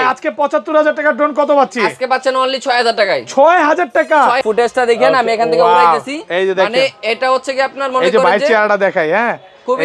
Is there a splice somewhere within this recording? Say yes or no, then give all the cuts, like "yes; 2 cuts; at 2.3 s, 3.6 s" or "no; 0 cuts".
yes; 1 cut; at 4.4 s